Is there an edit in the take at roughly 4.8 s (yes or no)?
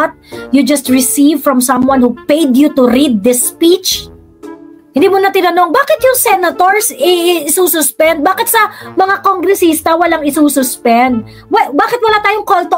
yes